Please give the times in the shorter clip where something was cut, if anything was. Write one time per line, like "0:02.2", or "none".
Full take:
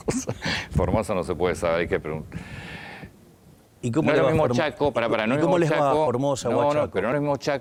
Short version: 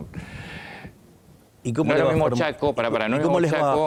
none